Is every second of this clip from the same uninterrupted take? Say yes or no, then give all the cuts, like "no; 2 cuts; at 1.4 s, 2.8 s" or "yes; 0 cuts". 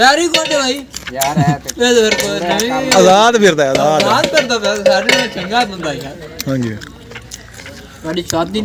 yes; 0 cuts